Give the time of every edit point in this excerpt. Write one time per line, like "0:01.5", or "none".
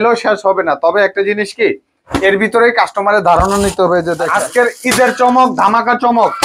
0:04.1